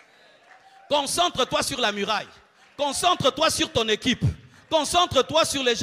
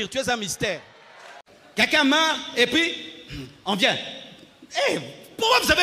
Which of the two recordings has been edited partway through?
second; 1 cut; at 1.5 s

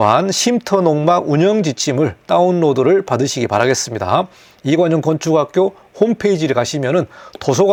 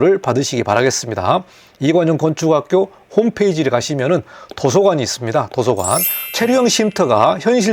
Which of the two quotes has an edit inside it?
second; 1 cut; at 6.2 s

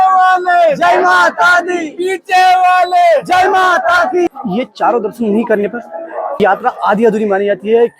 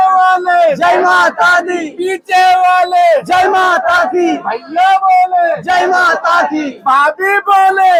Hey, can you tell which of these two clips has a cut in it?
first; 2 cuts; at 4.3 s, 6.4 s

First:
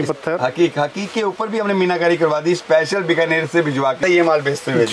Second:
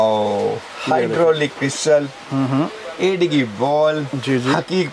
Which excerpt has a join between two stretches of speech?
first; 1 cut; at 4.0 s

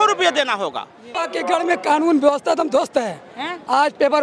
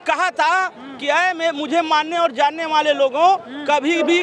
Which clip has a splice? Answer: first; 1 cut; at 1.1 s

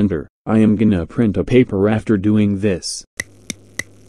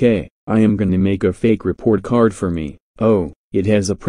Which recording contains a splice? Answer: first; 1 cut; at 2.9 s

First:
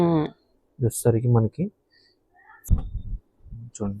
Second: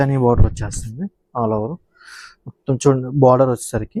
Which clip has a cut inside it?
first; 1 cut; at 2.7 s

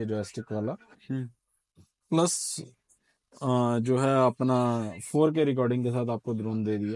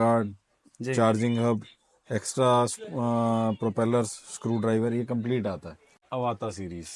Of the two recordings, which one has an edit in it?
second; 1 cut; at 6.0 s

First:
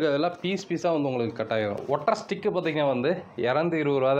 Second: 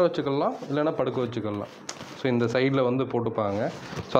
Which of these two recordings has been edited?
first; 1 cut; at 2.0 s

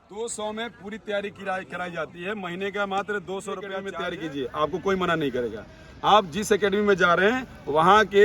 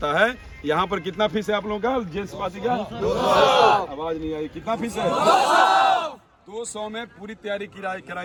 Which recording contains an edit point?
first; 1 cut; at 3.9 s

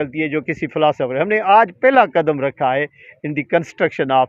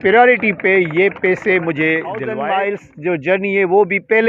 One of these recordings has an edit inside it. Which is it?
second; 1 cut; at 2.3 s

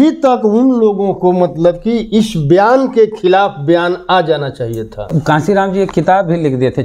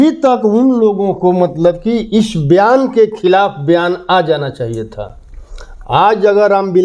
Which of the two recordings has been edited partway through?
first; 1 cut; at 5.1 s

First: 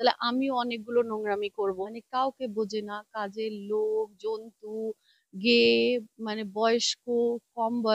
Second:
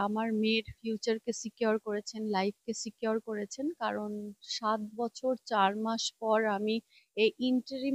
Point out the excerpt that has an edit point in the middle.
first; 1 cut; at 1.9 s

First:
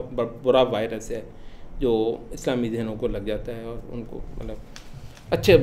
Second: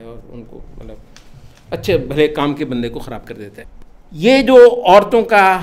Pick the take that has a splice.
second; 1 cut; at 3.6 s

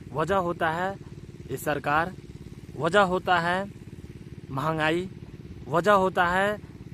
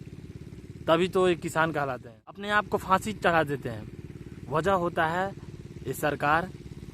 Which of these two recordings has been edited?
second; 1 cut; at 2.4 s

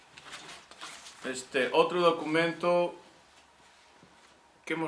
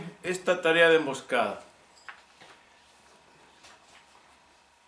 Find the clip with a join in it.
first; 1 cut; at 3.0 s

